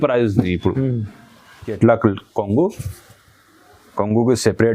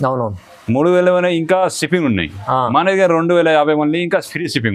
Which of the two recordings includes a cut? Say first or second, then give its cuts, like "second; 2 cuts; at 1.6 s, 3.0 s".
first; 1 cut; at 1.8 s